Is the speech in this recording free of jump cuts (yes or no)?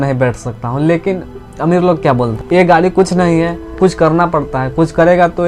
no